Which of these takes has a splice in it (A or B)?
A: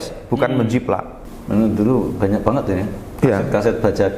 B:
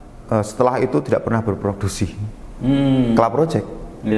A